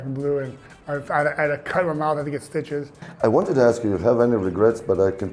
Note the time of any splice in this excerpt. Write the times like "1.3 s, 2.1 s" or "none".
3.1 s